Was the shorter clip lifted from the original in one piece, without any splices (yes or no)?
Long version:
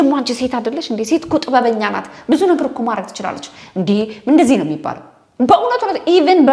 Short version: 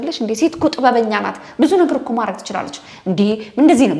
yes